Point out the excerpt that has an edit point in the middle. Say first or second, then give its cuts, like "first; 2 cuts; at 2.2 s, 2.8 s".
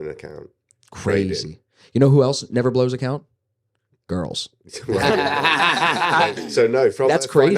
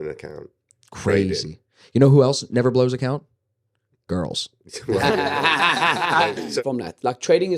second; 1 cut; at 6.6 s